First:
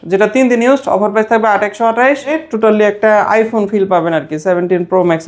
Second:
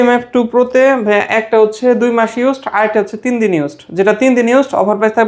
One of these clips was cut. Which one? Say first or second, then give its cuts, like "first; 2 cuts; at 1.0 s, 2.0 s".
first; 1 cut; at 2.4 s